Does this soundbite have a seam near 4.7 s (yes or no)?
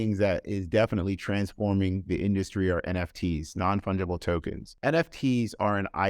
yes